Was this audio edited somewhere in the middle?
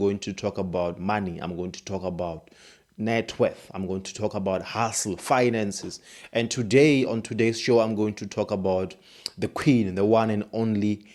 no; 0 cuts

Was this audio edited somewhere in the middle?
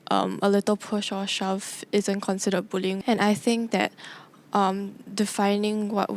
yes; 1 cut; at 3.0 s

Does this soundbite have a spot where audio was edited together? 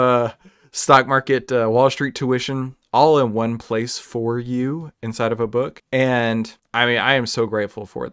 yes; 2 cuts; at 5.8 s, 6.6 s

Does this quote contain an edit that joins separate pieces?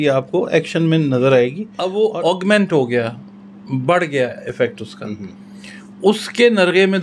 yes; 1 cut; at 1.9 s

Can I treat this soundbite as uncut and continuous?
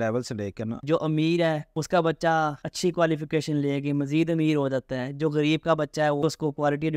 no; 4 cuts; at 0.8 s, 1.7 s, 2.6 s, 6.2 s

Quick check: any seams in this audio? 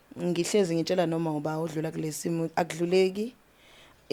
no; 0 cuts

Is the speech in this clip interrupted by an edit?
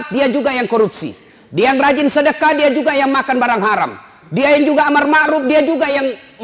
no; 0 cuts

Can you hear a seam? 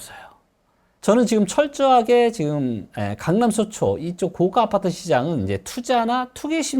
yes; 1 cut; at 1.0 s

